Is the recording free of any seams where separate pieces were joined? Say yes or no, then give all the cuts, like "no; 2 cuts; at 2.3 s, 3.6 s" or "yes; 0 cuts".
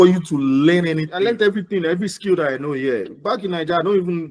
no; 1 cut; at 1.1 s